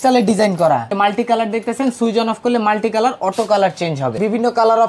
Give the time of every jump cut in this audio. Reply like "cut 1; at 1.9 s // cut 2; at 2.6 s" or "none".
cut 1; at 0.9 s // cut 2; at 4.2 s